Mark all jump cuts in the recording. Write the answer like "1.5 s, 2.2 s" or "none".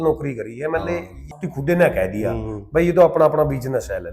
1.2 s